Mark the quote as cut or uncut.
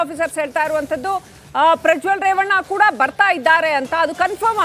uncut